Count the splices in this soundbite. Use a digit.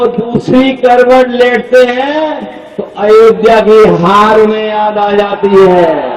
0